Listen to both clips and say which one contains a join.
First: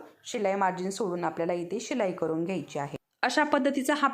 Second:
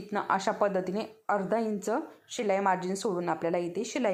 first; 1 cut; at 3.0 s

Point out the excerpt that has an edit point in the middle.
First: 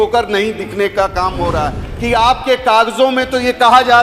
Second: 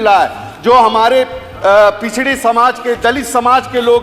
first; 1 cut; at 1.9 s

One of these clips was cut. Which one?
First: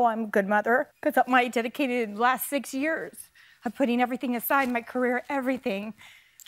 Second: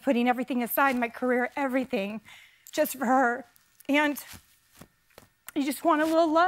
first; 1 cut; at 0.9 s

